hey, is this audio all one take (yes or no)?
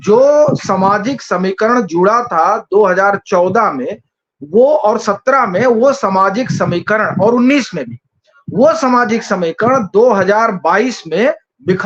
yes